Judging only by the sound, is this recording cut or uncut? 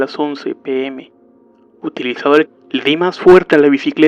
uncut